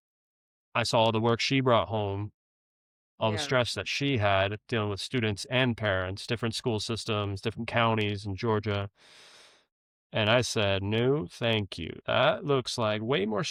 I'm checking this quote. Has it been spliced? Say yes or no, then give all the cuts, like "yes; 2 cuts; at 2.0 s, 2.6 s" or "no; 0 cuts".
no; 0 cuts